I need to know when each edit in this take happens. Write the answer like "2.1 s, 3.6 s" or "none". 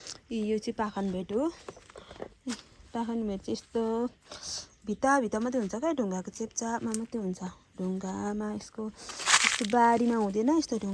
none